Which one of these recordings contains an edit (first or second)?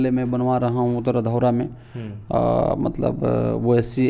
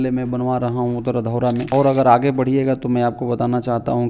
second